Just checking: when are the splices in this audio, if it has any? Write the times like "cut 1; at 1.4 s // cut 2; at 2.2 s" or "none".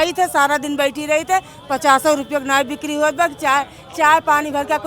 none